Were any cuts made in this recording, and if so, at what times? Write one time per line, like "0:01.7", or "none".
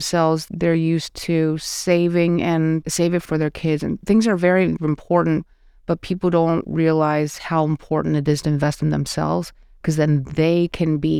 0:03.2